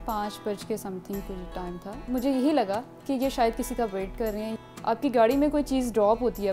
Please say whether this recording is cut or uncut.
cut